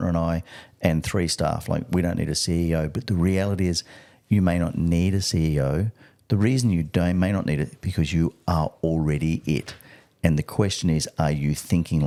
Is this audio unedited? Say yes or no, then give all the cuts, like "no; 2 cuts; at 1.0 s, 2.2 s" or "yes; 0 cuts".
yes; 0 cuts